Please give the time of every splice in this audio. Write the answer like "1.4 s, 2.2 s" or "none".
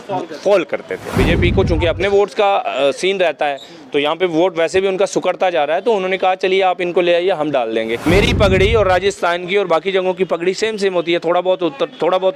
1.0 s, 8.0 s